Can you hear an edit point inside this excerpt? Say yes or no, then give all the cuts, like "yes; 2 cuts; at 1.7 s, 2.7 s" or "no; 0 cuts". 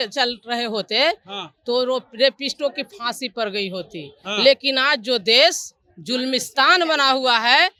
no; 0 cuts